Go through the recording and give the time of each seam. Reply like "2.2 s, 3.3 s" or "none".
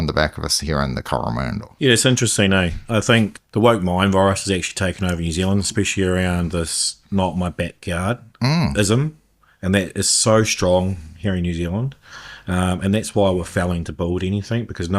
1.6 s, 3.4 s